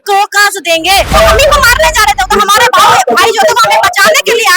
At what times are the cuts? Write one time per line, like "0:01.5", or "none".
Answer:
0:01.1